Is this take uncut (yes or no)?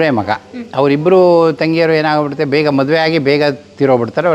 yes